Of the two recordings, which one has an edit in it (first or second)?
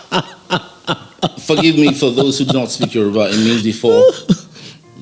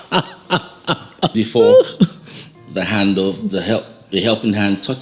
second